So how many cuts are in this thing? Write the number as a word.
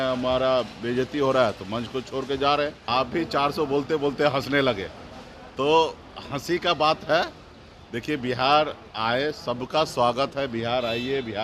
one